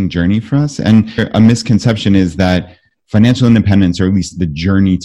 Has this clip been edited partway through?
yes; 1 cut; at 1.2 s

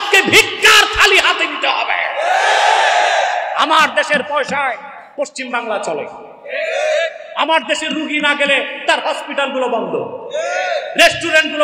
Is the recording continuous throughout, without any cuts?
yes; 0 cuts

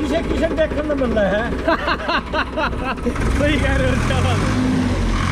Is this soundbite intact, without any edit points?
yes; 0 cuts

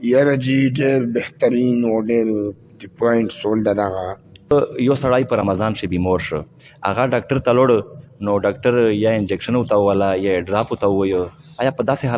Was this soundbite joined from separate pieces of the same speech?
yes; 1 cut; at 4.5 s

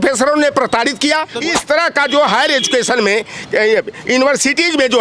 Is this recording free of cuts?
no; 1 cut; at 1.3 s

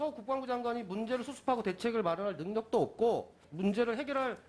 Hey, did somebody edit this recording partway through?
yes; 1 cut; at 3.4 s

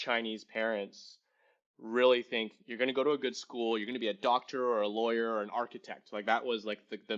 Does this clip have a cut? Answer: no; 0 cuts

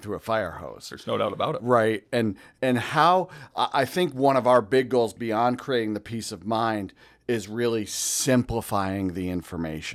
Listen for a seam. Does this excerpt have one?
no; 0 cuts

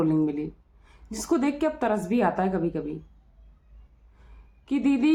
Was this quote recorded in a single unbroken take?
yes; 0 cuts

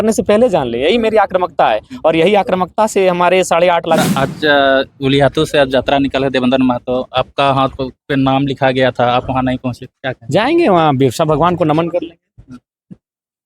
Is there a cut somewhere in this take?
yes; 1 cut; at 4.0 s

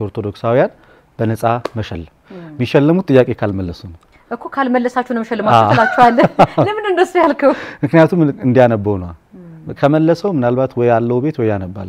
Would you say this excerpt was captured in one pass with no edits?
yes; 0 cuts

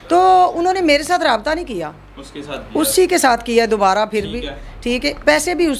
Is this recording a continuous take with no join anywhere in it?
yes; 0 cuts

